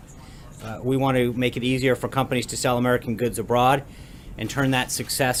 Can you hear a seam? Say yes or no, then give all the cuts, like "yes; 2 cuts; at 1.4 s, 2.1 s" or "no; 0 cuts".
no; 0 cuts